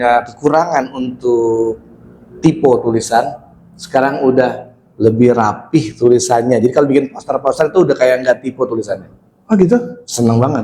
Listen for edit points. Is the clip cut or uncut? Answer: uncut